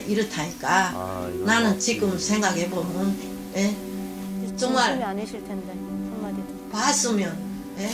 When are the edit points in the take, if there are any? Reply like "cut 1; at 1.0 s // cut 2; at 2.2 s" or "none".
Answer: none